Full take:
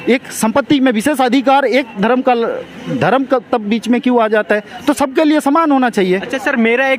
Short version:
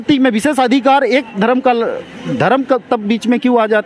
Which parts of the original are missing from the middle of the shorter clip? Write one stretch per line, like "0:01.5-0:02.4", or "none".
none